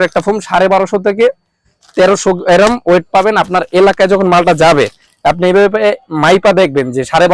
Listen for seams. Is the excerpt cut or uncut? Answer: uncut